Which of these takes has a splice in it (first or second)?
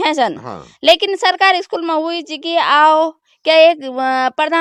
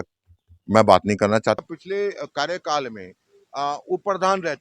second